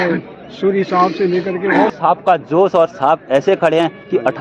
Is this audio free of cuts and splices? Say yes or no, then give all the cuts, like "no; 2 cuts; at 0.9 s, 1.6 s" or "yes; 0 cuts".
no; 1 cut; at 1.9 s